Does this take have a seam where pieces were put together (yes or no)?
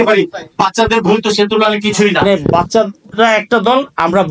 yes